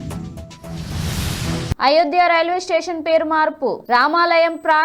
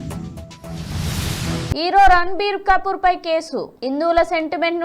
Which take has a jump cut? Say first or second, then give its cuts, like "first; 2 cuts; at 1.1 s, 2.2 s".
first; 1 cut; at 1.7 s